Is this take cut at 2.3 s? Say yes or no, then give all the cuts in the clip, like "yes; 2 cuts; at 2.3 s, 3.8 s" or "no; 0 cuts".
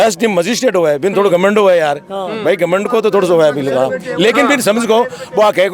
no; 0 cuts